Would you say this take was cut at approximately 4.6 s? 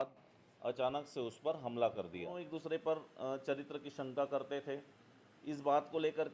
no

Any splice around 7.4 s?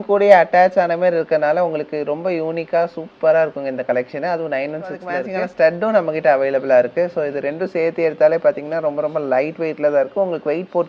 no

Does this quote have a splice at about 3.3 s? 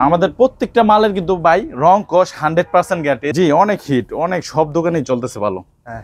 yes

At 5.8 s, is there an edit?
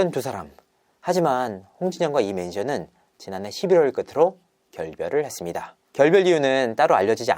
no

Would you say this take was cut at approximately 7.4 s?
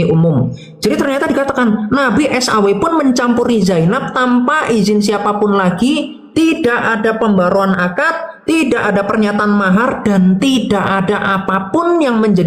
no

